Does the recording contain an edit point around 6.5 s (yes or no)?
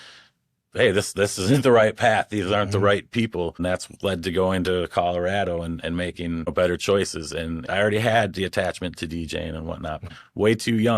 yes